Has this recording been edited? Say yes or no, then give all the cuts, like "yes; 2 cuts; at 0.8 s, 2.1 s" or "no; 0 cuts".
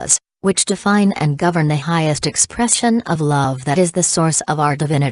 yes; 1 cut; at 4.2 s